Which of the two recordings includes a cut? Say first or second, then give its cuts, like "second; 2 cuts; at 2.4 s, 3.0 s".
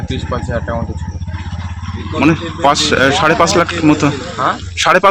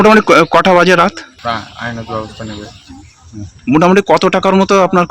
second; 1 cut; at 1.3 s